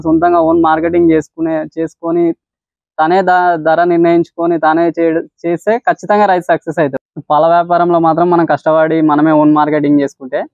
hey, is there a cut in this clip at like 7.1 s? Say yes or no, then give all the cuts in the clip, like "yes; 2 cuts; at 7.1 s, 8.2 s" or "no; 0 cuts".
yes; 1 cut; at 7.1 s